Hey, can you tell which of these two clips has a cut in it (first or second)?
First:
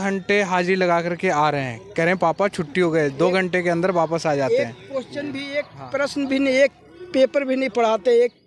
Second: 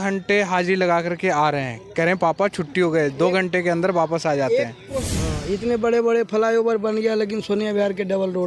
second